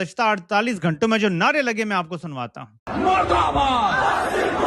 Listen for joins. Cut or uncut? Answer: cut